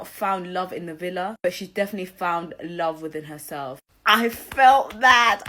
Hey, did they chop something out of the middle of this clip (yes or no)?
no